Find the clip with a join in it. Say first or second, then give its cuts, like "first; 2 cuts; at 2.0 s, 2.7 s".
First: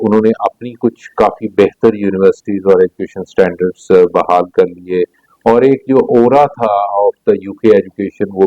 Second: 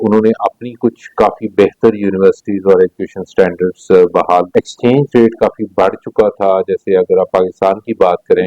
second; 1 cut; at 4.5 s